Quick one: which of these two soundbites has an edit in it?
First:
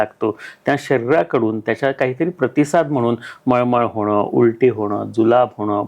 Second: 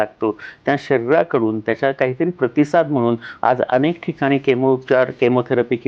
second; 1 cut; at 3.3 s

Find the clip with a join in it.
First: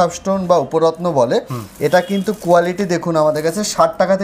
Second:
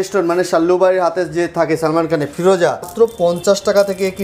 second; 1 cut; at 2.9 s

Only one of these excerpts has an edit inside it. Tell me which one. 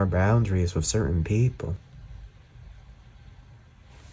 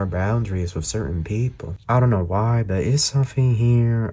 second; 1 cut; at 1.7 s

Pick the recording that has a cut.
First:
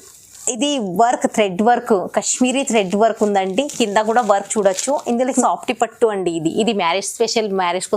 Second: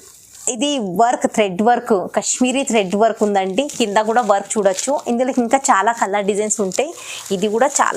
first; 1 cut; at 5.4 s

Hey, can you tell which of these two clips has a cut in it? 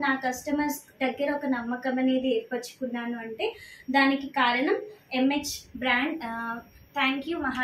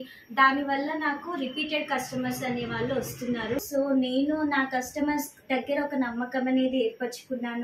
second; 1 cut; at 3.6 s

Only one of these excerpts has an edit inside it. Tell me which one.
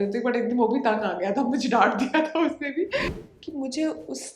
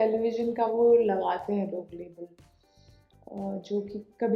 first; 1 cut; at 3.2 s

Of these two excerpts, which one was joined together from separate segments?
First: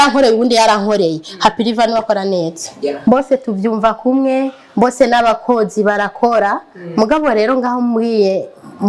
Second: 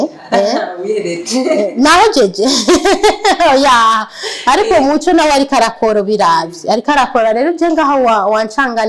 first; 1 cut; at 3.0 s

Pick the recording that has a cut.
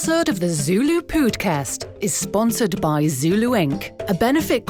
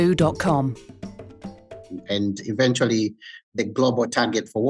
second; 1 cut; at 2.0 s

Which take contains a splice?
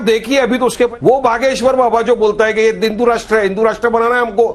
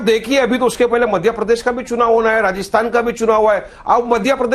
first; 1 cut; at 0.9 s

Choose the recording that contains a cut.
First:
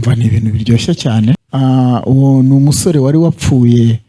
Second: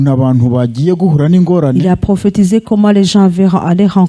first; 1 cut; at 1.4 s

